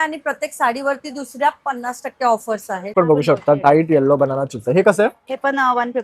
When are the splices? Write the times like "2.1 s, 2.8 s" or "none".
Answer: 2.9 s